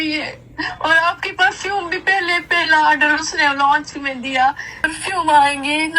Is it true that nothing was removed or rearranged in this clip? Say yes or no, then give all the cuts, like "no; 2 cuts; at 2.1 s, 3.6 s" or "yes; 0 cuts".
no; 1 cut; at 4.9 s